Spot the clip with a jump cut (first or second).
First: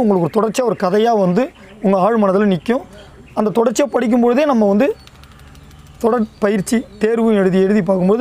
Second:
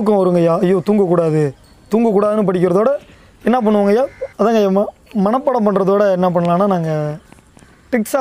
second